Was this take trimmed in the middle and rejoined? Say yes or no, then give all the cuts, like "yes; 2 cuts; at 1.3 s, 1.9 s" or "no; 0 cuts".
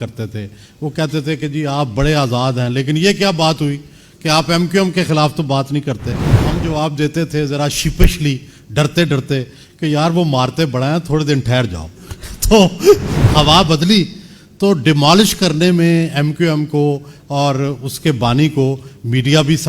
yes; 2 cuts; at 6.4 s, 13.2 s